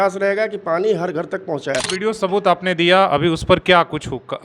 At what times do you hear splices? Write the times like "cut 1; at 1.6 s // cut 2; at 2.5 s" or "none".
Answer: cut 1; at 1.9 s